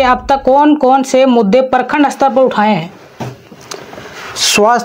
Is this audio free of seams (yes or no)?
yes